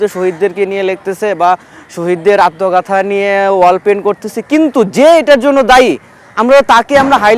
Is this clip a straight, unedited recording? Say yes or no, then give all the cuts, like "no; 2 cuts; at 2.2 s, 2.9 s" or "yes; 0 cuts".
yes; 0 cuts